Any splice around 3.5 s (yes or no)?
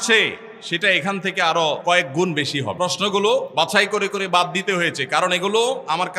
yes